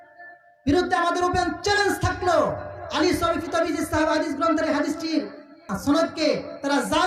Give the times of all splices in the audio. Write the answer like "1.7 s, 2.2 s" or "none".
5.6 s